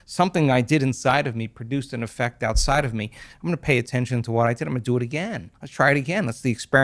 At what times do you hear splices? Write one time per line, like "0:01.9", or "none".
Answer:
none

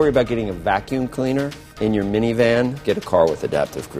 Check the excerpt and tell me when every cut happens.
0:01.6
0:02.8

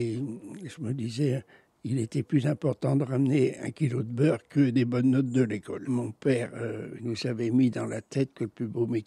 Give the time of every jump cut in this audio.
0:05.8
0:06.9

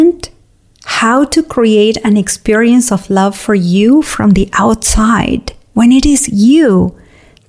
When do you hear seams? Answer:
0:05.5

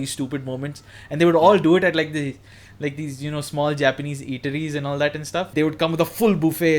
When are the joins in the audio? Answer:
0:05.5

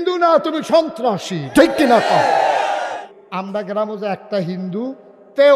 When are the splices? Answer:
0:03.1

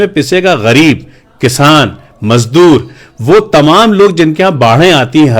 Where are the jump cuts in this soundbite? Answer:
none

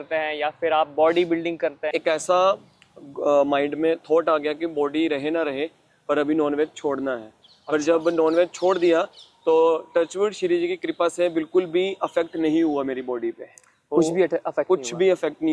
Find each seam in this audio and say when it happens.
0:01.8

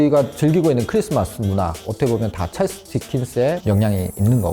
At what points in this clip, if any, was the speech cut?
0:01.8

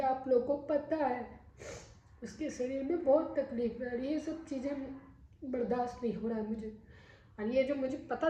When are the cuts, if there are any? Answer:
none

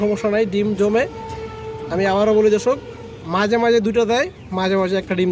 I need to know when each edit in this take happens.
none

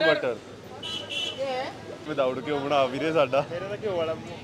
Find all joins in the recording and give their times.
0:02.0

